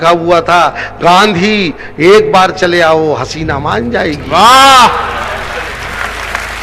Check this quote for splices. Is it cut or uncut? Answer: uncut